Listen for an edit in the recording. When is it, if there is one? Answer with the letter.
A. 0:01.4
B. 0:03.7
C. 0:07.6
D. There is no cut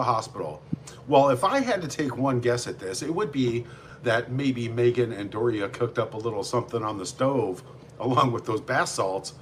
D